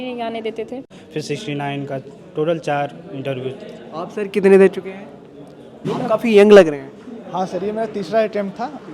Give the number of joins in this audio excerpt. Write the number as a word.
one